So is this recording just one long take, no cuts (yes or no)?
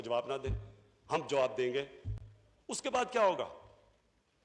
yes